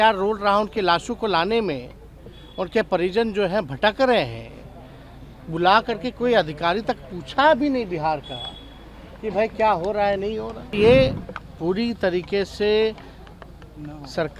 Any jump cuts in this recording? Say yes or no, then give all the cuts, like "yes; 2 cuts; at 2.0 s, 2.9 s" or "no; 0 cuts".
yes; 1 cut; at 10.7 s